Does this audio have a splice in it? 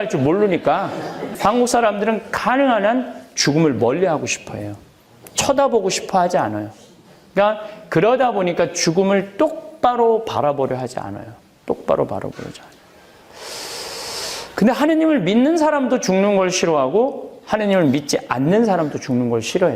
yes; 1 cut; at 1.2 s

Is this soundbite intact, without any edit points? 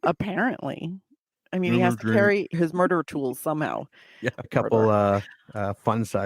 no; 2 cuts; at 2.5 s, 4.5 s

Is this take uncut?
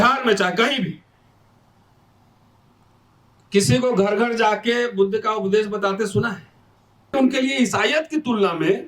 no; 1 cut; at 7.1 s

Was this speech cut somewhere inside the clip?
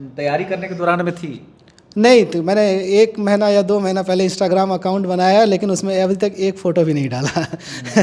no; 0 cuts

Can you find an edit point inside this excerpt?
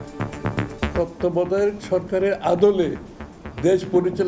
yes; 1 cut; at 0.9 s

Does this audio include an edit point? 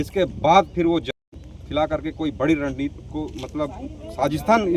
no; 0 cuts

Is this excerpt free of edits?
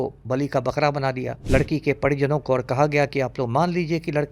no; 1 cut; at 1.3 s

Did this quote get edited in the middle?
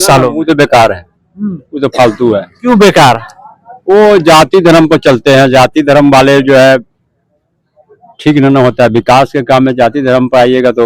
no; 0 cuts

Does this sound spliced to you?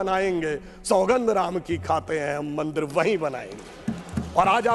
no; 0 cuts

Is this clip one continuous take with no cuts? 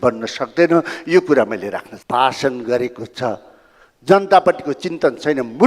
no; 1 cut; at 1.9 s

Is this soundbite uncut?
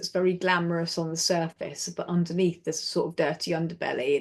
yes; 0 cuts

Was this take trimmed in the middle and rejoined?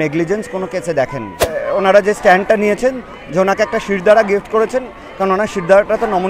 yes; 1 cut; at 1.5 s

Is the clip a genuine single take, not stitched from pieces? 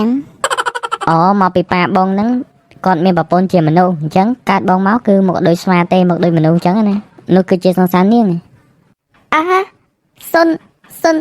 no; 1 cut; at 7.1 s

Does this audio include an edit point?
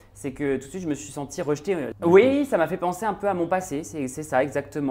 yes; 1 cut; at 1.9 s

